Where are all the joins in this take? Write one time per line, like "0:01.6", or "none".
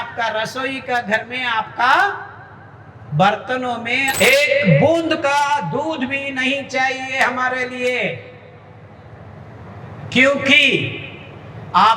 0:04.1